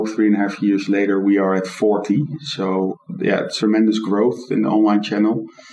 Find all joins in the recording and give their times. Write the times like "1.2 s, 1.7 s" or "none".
3.3 s